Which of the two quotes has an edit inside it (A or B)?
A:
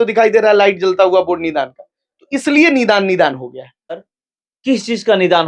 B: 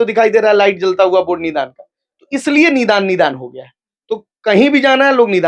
A